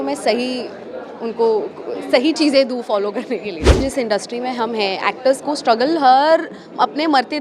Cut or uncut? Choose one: cut